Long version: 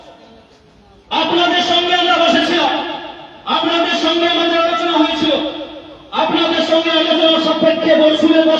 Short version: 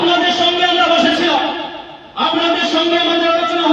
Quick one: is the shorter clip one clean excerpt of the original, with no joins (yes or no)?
yes